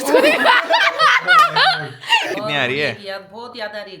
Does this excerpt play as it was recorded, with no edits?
no; 1 cut; at 2.3 s

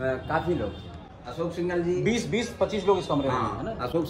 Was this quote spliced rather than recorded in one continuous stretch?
no; 0 cuts

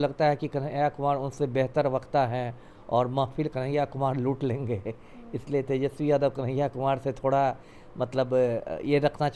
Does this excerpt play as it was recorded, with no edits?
yes; 0 cuts

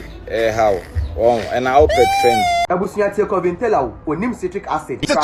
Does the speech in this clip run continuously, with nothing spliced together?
no; 1 cut; at 2.6 s

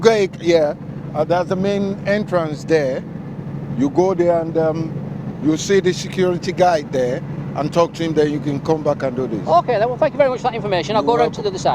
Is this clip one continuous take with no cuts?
yes; 0 cuts

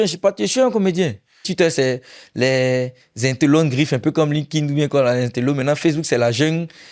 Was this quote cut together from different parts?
yes; 1 cut; at 1.4 s

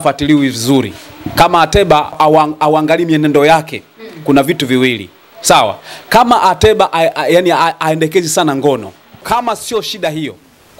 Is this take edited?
yes; 2 cuts; at 2.2 s, 9.2 s

